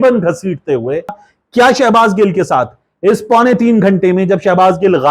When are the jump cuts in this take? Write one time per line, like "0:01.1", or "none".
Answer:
0:01.2